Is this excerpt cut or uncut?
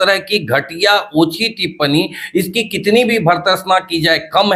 uncut